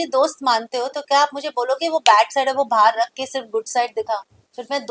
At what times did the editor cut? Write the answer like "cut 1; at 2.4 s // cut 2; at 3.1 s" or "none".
none